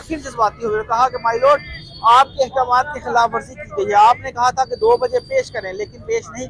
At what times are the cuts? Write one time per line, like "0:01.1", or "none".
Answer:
none